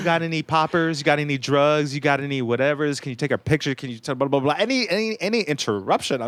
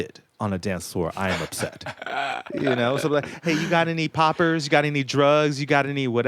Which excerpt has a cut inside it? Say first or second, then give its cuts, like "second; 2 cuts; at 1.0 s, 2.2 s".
second; 1 cut; at 2.5 s